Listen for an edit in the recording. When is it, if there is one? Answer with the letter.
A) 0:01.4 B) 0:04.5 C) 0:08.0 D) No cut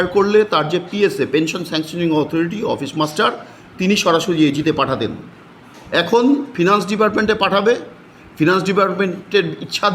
D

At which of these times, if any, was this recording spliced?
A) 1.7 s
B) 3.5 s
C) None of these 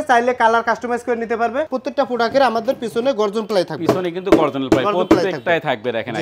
A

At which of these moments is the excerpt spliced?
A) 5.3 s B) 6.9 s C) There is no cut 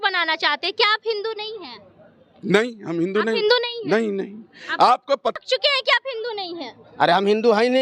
A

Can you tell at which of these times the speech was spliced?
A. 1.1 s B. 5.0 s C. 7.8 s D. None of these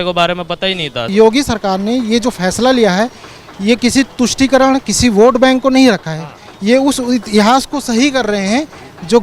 A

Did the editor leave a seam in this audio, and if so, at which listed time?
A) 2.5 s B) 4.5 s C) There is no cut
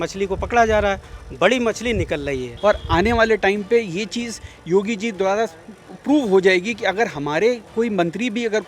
A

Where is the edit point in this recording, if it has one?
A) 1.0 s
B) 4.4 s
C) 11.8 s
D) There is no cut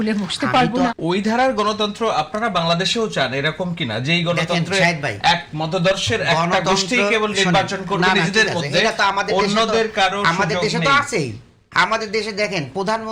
A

